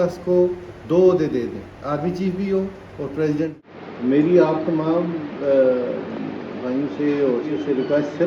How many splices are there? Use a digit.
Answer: 2